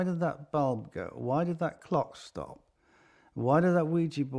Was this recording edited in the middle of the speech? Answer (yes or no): no